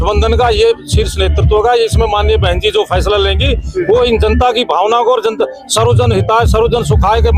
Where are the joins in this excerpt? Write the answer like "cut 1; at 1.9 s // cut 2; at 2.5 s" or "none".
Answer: none